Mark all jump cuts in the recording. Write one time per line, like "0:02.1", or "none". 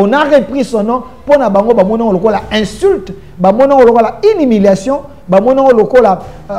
none